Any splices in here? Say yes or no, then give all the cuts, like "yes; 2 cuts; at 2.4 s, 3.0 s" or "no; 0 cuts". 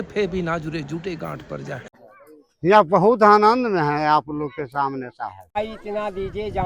yes; 2 cuts; at 2.0 s, 5.5 s